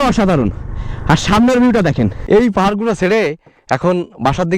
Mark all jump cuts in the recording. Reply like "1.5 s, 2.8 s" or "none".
2.2 s